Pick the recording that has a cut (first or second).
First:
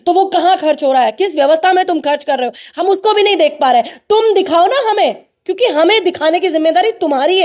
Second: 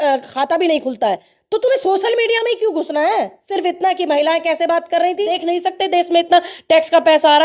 second